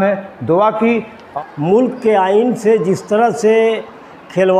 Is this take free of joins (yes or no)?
no